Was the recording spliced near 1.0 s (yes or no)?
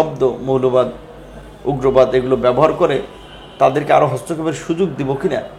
no